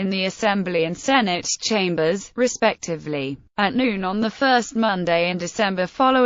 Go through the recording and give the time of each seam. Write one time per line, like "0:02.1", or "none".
0:02.3